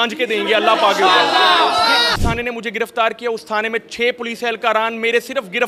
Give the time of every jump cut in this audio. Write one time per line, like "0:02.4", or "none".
0:02.2